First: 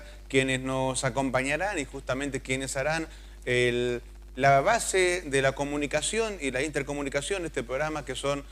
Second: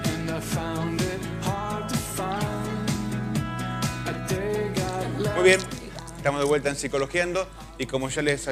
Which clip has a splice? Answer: second; 1 cut; at 3.2 s

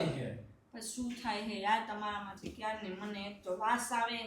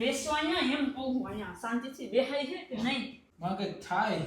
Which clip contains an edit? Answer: second; 1 cut; at 3.2 s

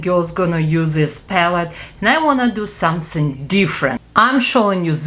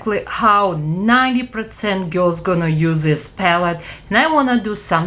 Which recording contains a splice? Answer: first; 1 cut; at 4.0 s

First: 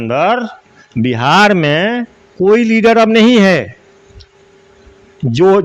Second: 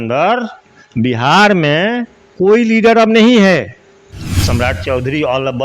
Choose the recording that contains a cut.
second; 1 cut; at 4.4 s

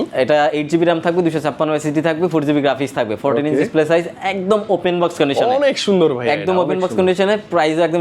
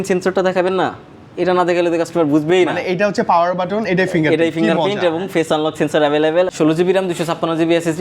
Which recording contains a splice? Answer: second; 1 cut; at 6.5 s

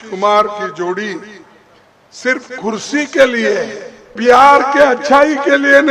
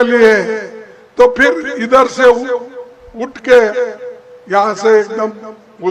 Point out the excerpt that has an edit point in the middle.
first; 1 cut; at 4.2 s

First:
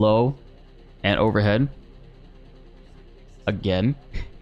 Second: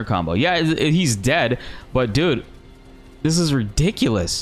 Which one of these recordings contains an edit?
first; 2 cuts; at 1.7 s, 3.4 s

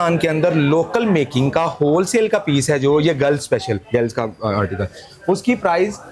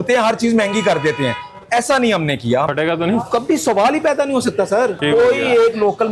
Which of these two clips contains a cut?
second; 2 cuts; at 2.7 s, 5.0 s

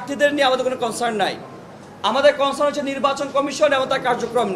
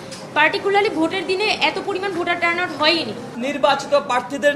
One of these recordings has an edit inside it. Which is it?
second; 1 cut; at 3.3 s

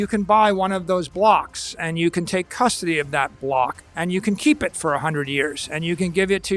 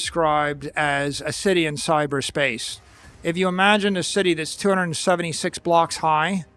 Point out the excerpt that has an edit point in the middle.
first; 1 cut; at 3.8 s

